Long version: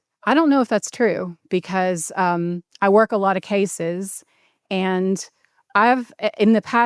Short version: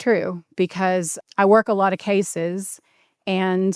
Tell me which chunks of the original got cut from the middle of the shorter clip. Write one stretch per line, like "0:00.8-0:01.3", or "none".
0:02.1-0:02.6